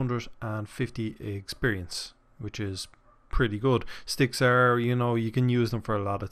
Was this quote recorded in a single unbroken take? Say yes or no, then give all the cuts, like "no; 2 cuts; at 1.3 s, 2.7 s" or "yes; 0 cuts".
yes; 0 cuts